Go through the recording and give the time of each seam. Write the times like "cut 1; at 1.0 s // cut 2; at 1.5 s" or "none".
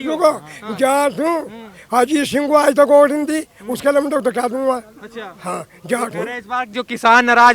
none